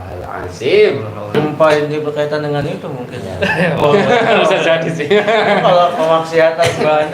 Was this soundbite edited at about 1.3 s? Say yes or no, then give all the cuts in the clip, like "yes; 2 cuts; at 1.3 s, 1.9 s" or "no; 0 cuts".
yes; 1 cut; at 1.3 s